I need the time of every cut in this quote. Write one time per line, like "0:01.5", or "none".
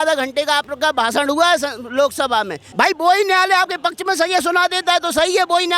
0:02.7